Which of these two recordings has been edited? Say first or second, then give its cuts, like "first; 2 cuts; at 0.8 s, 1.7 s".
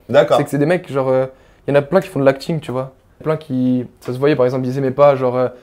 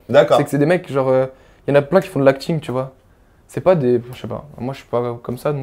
first; 1 cut; at 3.2 s